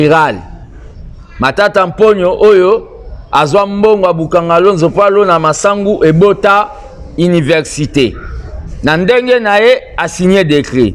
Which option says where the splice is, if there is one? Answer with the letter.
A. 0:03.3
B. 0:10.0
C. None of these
C